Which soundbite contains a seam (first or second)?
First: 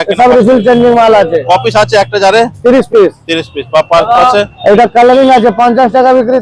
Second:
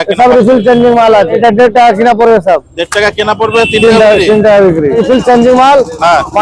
second